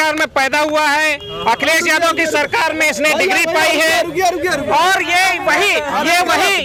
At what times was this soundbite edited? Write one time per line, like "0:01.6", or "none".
none